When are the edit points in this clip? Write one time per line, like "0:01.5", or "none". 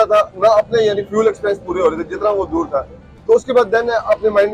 none